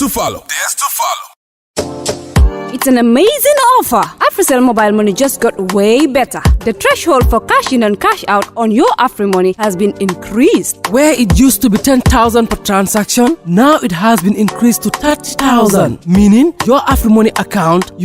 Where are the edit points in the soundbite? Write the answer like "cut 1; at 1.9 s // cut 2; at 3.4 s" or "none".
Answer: cut 1; at 1.2 s